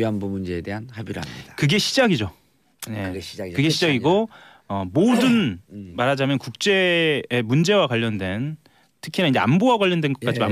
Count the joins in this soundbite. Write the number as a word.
one